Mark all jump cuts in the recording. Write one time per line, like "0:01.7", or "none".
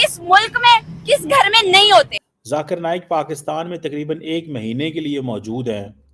0:02.3